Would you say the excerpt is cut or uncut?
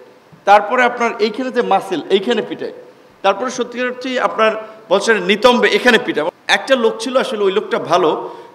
cut